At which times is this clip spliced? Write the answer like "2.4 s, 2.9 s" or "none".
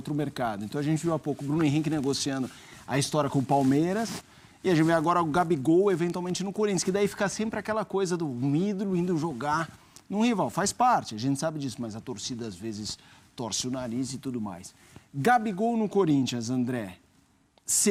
none